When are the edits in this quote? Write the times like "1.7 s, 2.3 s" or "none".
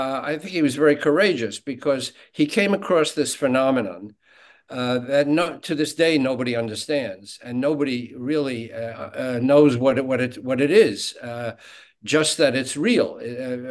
none